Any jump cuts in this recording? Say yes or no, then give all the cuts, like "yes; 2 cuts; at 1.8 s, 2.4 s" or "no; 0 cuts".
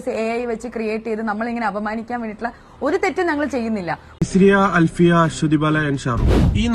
yes; 1 cut; at 4.0 s